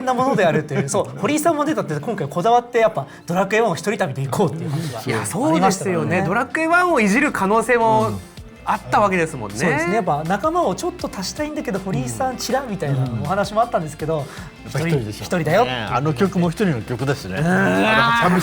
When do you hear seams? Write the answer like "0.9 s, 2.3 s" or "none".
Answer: none

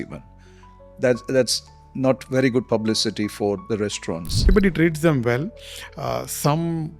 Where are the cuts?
4.5 s

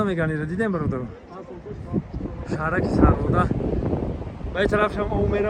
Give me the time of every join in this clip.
none

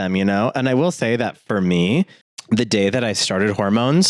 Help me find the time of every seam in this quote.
2.3 s

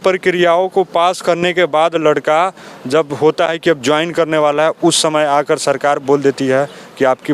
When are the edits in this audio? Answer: none

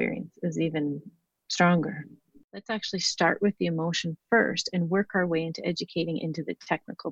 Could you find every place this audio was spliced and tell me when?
2.3 s

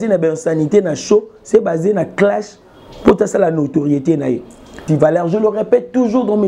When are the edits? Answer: 4.8 s

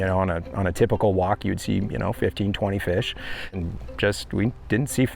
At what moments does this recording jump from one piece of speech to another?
3.6 s

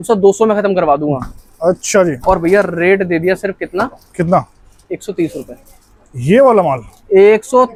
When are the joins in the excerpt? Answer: none

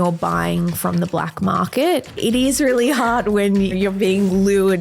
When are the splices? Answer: 2.1 s, 3.7 s

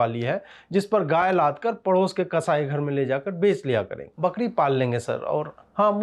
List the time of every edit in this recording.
4.0 s

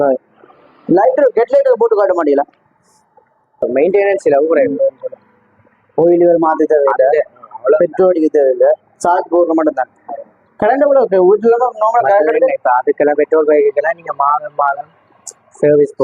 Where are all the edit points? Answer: 3.6 s

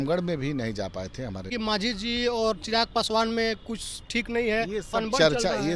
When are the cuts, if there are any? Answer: 1.5 s

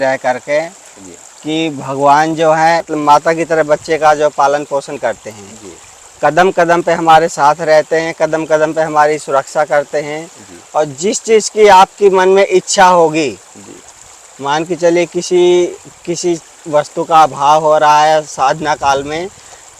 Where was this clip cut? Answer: 2.8 s

